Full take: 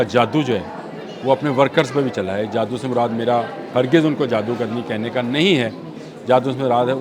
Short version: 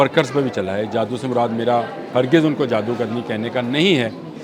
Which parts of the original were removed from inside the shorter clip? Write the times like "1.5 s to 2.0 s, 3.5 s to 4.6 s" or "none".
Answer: none